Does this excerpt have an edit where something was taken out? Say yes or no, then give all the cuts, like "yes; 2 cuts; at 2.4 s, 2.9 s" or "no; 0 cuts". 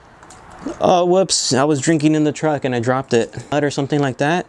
yes; 1 cut; at 3.5 s